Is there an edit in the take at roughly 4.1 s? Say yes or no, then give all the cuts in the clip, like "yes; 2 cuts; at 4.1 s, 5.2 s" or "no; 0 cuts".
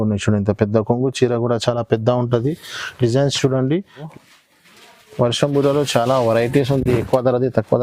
yes; 1 cut; at 4.1 s